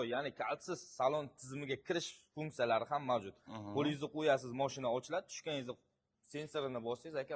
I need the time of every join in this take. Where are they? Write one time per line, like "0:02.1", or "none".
none